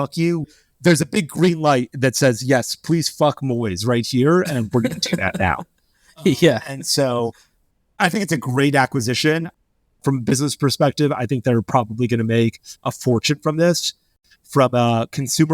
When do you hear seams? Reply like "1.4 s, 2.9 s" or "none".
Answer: 14.1 s